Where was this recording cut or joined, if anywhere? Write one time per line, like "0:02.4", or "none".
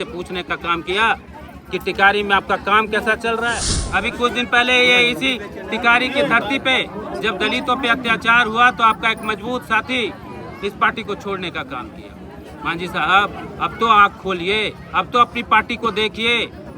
0:03.7

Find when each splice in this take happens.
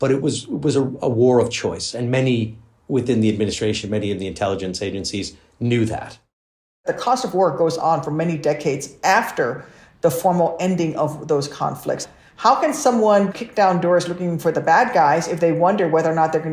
0:06.8
0:12.0
0:13.3

